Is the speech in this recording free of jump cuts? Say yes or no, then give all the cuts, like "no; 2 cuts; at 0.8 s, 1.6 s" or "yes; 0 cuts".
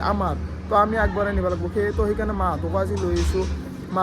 yes; 0 cuts